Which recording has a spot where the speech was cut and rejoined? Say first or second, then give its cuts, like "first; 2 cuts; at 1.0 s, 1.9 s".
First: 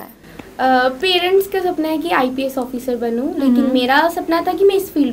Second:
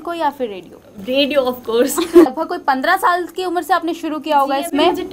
second; 1 cut; at 2.4 s